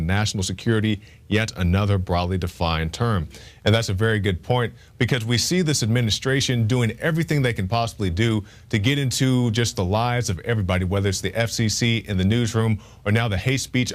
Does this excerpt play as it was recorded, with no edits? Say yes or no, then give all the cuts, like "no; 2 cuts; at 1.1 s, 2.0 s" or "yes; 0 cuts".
no; 1 cut; at 1.9 s